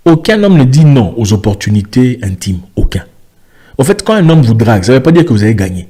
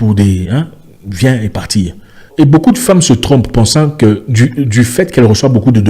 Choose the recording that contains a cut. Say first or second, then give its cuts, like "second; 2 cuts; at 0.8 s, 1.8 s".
second; 1 cut; at 2.3 s